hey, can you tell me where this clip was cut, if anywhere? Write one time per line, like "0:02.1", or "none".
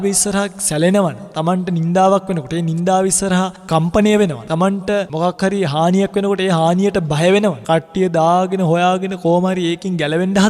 0:01.3
0:04.5
0:07.6